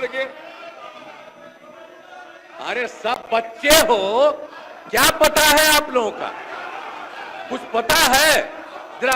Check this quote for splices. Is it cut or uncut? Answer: uncut